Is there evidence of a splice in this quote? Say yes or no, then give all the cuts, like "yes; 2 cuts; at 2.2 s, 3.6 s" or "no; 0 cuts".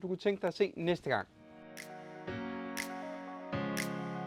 yes; 1 cut; at 1.3 s